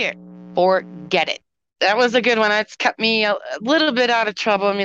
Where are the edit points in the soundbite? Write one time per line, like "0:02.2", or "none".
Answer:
0:01.6